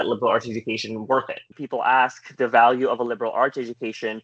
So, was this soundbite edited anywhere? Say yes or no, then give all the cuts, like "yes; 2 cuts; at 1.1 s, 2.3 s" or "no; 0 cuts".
yes; 1 cut; at 1.5 s